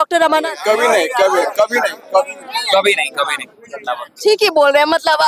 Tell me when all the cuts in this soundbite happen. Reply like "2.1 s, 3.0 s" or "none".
none